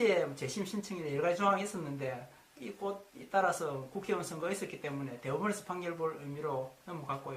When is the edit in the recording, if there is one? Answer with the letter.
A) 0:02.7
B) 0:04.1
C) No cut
A